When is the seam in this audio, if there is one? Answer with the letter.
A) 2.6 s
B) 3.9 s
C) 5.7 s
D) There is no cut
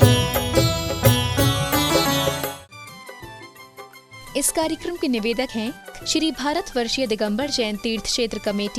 A